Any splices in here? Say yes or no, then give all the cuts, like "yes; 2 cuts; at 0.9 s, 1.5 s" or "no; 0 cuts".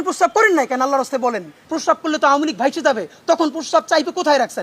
yes; 1 cut; at 1.6 s